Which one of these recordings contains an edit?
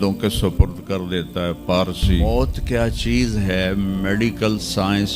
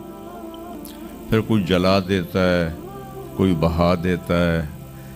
first; 1 cut; at 2.2 s

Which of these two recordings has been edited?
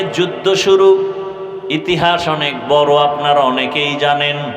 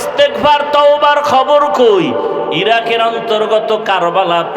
second; 1 cut; at 2.5 s

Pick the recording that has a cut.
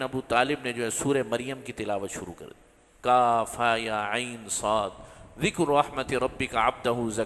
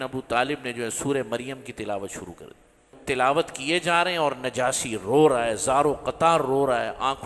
second; 1 cut; at 2.9 s

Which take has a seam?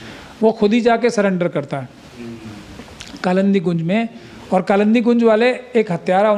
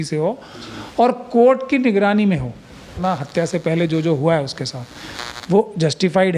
second; 1 cut; at 3.0 s

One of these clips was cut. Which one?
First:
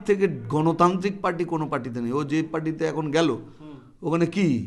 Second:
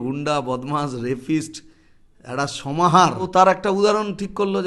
second; 1 cut; at 3.3 s

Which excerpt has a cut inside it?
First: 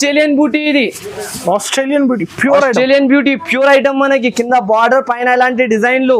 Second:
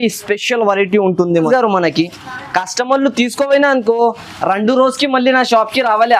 second; 1 cut; at 1.5 s

